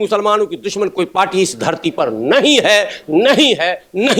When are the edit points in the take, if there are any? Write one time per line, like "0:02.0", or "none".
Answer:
none